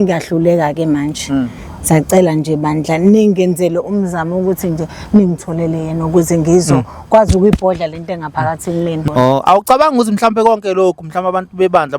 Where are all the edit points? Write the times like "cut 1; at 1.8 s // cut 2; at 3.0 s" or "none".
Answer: cut 1; at 9.0 s